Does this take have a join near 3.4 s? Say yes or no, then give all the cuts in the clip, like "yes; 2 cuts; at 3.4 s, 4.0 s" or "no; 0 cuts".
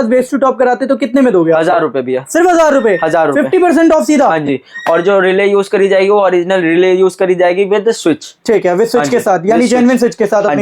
no; 0 cuts